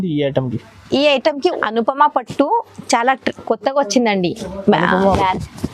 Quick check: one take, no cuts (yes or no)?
no